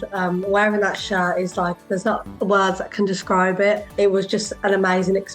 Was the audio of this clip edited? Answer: yes; 2 cuts; at 2.3 s, 3.9 s

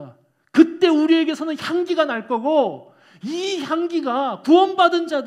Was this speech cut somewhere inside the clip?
no; 0 cuts

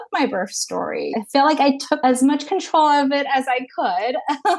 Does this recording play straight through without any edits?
yes; 0 cuts

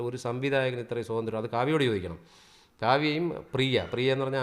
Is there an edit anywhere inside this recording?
no; 0 cuts

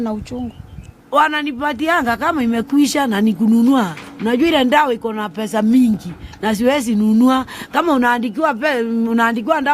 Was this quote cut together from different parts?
no; 0 cuts

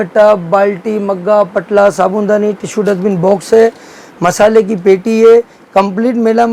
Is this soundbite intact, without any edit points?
yes; 0 cuts

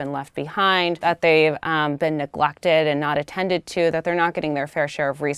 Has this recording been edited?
yes; 1 cut; at 1.0 s

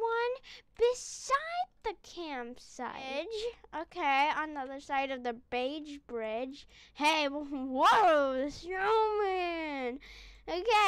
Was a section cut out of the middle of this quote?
yes; 1 cut; at 3.1 s

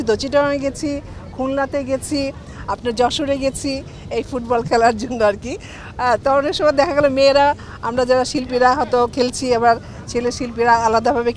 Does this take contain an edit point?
no; 0 cuts

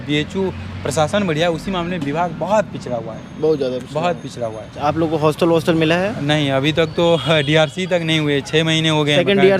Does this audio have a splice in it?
yes; 1 cut; at 4.8 s

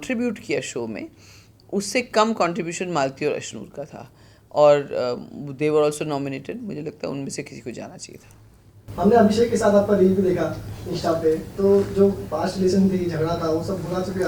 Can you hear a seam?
no; 0 cuts

